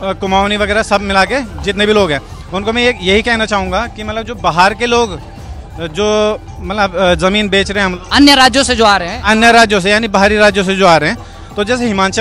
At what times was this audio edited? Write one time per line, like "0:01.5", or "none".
none

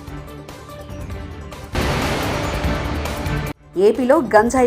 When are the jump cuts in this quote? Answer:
0:01.7
0:03.6

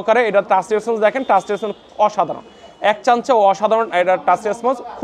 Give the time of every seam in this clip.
none

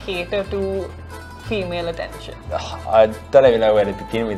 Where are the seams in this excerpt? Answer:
none

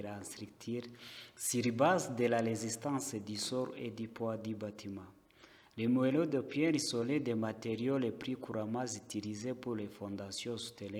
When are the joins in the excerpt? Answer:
none

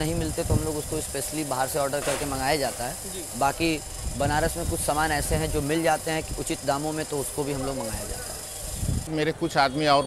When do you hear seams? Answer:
0:09.1

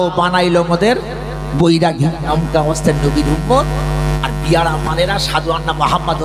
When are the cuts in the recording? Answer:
0:02.2

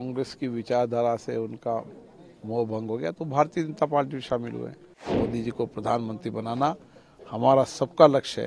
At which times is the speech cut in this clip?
0:05.1

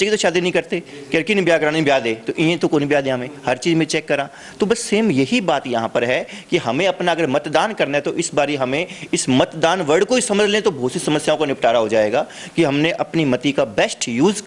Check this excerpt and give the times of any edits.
none

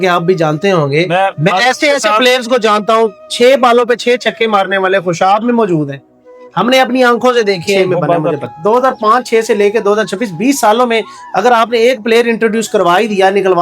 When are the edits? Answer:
0:08.4

